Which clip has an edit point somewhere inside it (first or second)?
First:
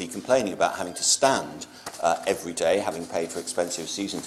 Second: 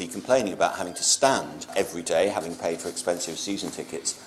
second